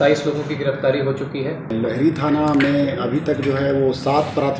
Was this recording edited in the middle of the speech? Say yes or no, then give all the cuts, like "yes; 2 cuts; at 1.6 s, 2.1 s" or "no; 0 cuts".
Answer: yes; 1 cut; at 1.7 s